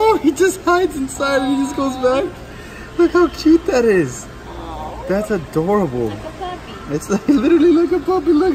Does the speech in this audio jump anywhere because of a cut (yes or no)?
no